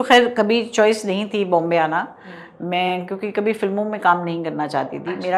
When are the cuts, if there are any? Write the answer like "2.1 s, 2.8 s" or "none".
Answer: none